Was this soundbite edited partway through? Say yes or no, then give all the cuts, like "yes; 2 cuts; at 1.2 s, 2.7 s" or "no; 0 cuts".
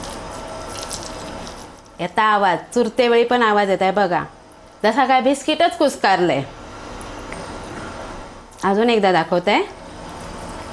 no; 0 cuts